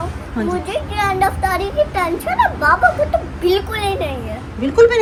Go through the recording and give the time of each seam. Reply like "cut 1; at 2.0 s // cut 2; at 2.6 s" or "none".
none